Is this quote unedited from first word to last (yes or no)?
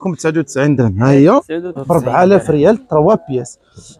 no